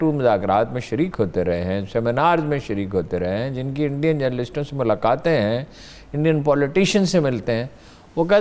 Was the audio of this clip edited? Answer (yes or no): no